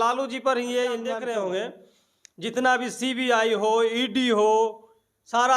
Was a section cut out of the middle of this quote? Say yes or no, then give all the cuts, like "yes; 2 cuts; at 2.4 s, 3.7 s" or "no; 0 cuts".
yes; 1 cut; at 1.1 s